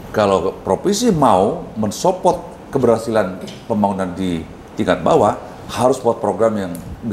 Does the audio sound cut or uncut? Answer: uncut